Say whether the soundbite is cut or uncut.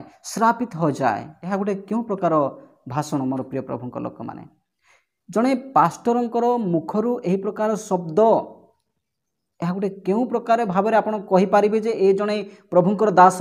cut